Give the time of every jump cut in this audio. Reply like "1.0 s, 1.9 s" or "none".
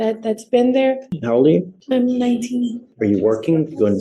1.1 s, 1.8 s, 2.8 s